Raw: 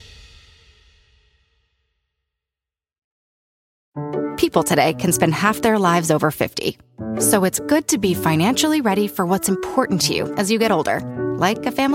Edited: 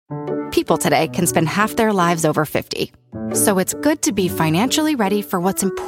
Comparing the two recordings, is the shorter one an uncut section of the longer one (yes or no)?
yes